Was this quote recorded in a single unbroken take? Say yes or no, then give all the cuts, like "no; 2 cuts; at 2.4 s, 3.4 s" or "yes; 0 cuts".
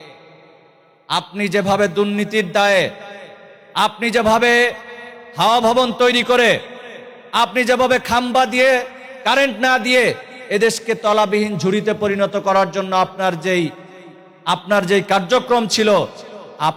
yes; 0 cuts